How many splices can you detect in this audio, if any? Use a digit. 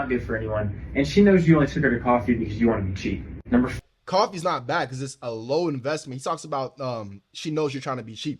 1